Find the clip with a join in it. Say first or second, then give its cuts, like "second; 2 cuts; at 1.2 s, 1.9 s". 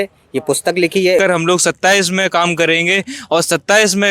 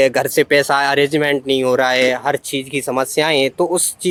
first; 1 cut; at 1.2 s